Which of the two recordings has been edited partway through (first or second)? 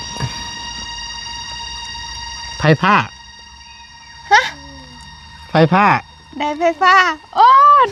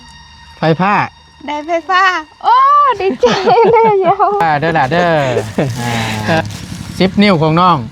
second